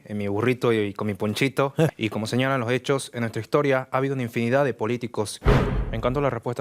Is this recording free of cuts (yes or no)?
no